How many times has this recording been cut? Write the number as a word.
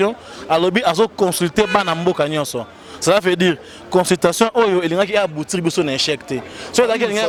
zero